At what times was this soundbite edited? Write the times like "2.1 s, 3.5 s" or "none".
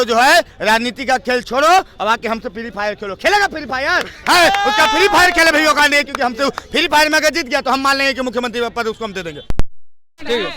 9.4 s